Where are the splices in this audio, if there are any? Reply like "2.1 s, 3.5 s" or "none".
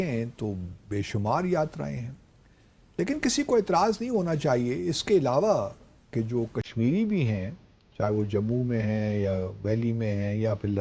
none